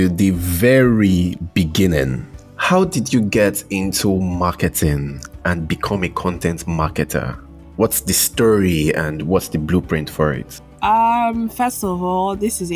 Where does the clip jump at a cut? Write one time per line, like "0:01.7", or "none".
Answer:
none